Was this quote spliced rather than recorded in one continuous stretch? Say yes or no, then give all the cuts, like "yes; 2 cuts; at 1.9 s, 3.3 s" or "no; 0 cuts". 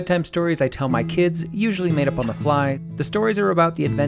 yes; 1 cut; at 2.9 s